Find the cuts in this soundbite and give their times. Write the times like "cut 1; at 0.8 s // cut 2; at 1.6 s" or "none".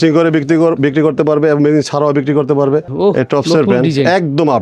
cut 1; at 2.9 s

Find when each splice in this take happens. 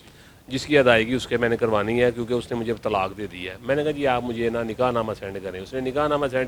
none

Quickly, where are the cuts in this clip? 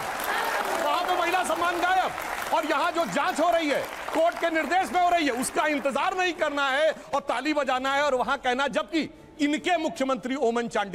none

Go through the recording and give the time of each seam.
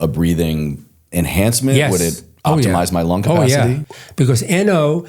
cut 1; at 3.8 s

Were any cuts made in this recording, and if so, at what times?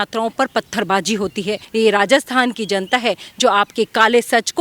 cut 1; at 1.6 s

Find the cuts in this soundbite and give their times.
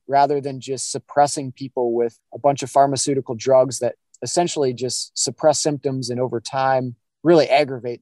cut 1; at 2.2 s // cut 2; at 7.0 s

